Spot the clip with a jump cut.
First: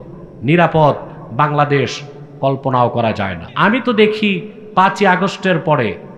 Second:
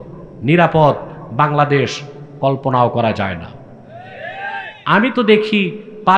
first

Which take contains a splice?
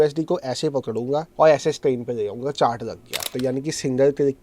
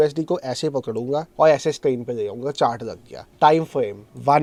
first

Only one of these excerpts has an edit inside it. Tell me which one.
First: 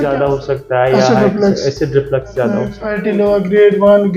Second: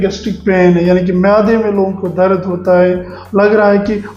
first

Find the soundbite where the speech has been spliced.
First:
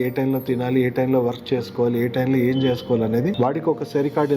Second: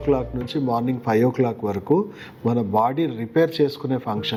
first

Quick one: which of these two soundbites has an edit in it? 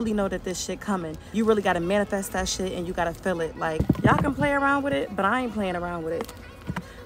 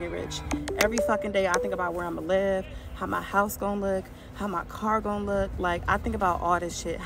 first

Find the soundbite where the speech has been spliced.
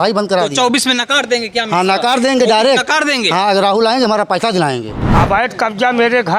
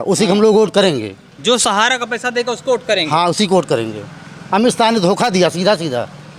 first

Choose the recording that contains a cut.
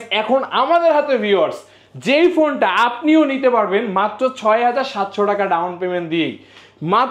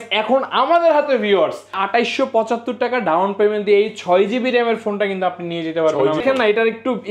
second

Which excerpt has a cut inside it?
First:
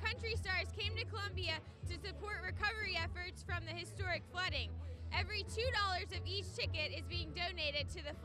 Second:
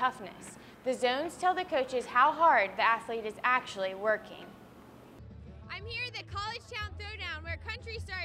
second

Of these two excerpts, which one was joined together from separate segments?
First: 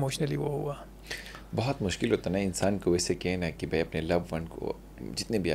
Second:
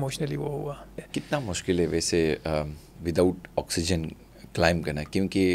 second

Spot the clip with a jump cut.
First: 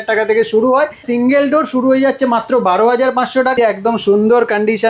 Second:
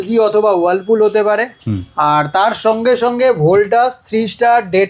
first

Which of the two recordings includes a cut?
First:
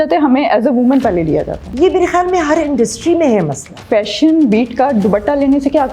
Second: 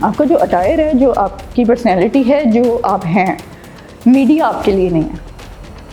first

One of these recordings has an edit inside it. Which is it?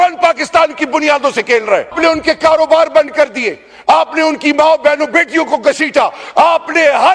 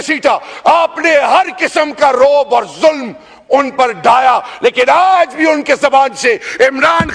first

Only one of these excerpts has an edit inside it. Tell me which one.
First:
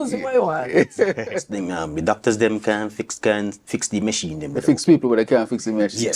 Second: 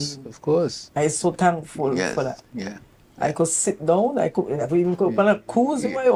first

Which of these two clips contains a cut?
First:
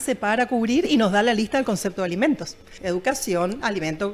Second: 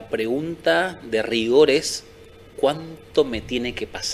first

